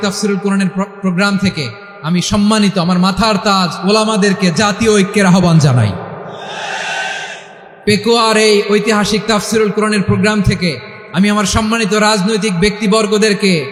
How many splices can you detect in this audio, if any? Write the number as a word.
zero